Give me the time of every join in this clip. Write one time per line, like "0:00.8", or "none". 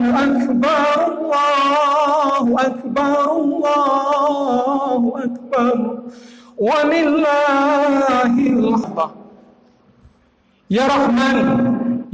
0:08.9